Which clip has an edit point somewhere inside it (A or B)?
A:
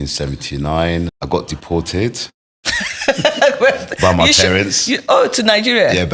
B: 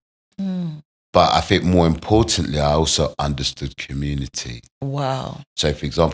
A